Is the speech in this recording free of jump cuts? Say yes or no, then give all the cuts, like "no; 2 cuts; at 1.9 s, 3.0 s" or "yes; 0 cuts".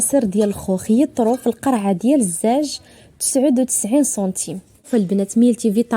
no; 1 cut; at 4.9 s